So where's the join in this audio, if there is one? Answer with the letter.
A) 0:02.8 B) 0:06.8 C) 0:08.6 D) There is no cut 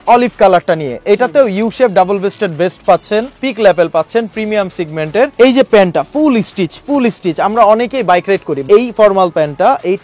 C